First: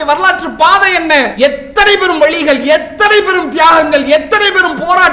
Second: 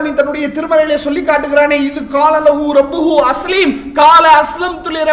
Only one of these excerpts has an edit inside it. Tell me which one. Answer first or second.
first